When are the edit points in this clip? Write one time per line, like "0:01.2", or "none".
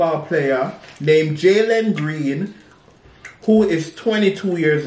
none